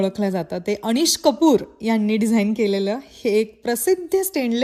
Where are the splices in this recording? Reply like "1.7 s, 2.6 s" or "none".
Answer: none